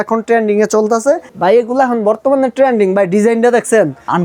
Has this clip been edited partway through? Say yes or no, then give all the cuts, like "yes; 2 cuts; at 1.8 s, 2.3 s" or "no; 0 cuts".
yes; 1 cut; at 1.3 s